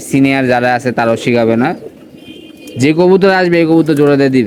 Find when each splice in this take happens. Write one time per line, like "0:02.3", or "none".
none